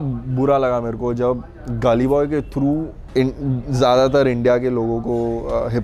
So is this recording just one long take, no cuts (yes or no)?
no